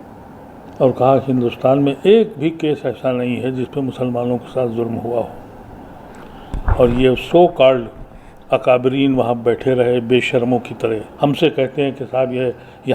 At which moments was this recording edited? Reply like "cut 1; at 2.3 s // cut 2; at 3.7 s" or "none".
cut 1; at 11.1 s